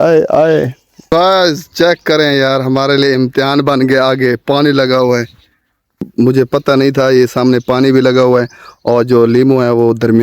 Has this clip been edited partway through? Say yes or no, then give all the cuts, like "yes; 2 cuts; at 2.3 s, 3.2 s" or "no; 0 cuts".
yes; 1 cut; at 1.0 s